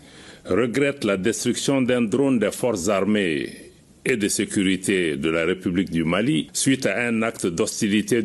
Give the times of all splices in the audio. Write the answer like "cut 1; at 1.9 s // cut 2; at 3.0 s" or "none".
cut 1; at 6.5 s